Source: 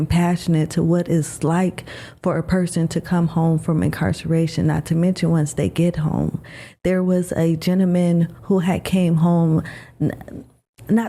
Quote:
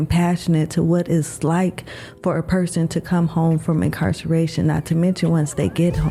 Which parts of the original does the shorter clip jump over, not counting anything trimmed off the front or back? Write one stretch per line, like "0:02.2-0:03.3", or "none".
none